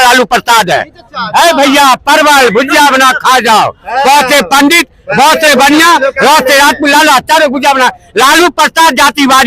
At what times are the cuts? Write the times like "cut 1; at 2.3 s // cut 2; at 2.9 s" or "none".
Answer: none